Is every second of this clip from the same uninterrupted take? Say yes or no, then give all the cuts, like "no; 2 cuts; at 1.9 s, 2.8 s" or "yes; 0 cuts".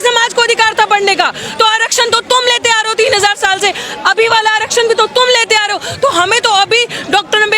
yes; 0 cuts